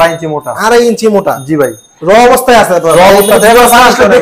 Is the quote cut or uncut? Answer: cut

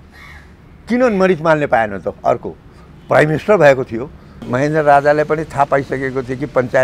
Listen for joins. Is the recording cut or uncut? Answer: cut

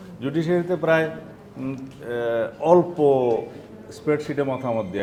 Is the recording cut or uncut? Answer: uncut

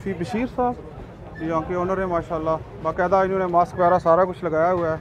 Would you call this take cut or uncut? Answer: uncut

